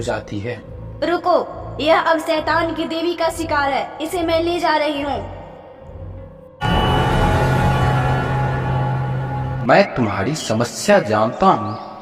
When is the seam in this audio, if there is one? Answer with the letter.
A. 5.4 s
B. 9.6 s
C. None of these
B